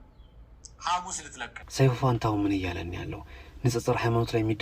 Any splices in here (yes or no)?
yes